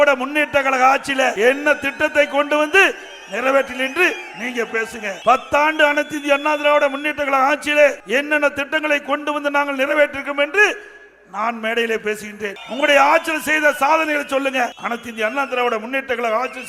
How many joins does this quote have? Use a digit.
5